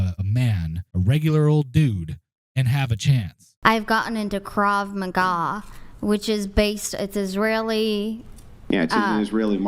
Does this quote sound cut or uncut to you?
cut